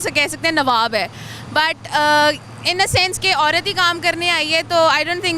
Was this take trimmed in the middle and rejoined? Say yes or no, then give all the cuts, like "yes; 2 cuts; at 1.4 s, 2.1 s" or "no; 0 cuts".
no; 0 cuts